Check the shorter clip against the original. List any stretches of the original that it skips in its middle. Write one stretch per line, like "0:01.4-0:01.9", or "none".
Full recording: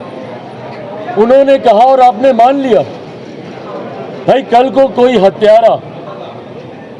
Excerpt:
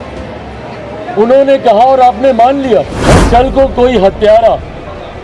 0:02.9-0:04.1